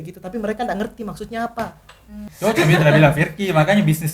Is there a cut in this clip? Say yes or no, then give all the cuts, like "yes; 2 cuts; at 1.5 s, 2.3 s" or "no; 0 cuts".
yes; 1 cut; at 2.0 s